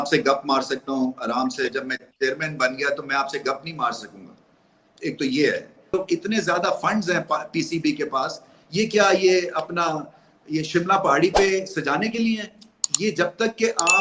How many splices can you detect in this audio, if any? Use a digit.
1